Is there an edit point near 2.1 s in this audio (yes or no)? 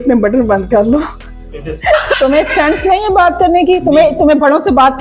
yes